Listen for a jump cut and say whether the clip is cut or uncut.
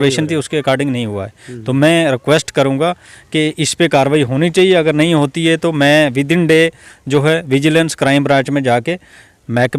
uncut